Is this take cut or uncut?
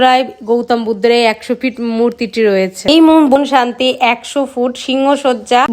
cut